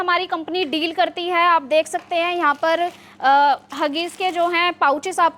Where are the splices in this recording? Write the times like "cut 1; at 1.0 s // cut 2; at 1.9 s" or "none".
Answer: none